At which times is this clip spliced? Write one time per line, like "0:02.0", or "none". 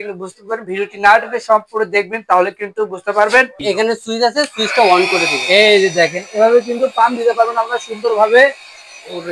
0:03.6